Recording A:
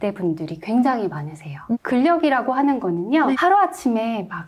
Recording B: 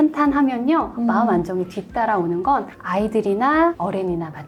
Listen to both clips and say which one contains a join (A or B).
A